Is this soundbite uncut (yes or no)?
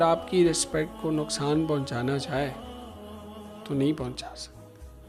yes